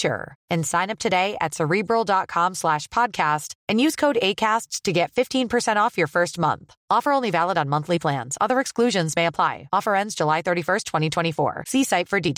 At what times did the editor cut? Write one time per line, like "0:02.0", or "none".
none

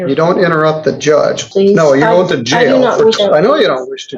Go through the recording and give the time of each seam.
0:01.5
0:03.2

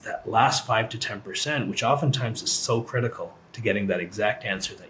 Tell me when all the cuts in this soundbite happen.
none

